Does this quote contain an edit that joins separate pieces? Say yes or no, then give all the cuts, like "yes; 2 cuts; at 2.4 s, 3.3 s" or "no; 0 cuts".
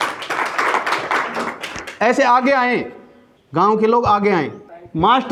no; 0 cuts